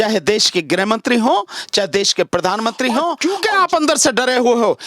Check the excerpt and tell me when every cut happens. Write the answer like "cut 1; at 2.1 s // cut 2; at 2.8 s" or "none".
cut 1; at 3.2 s